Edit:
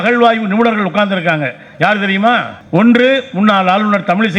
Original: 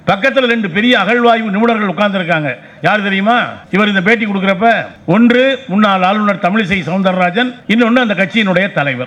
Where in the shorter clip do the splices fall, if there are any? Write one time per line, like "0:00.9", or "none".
0:02.6